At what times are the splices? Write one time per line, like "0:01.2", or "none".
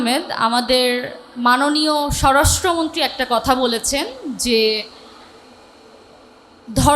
none